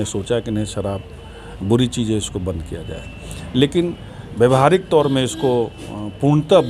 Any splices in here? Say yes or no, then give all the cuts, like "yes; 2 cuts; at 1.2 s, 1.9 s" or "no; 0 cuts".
no; 0 cuts